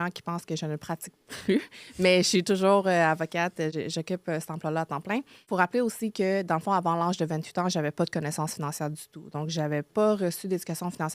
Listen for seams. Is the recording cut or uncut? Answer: cut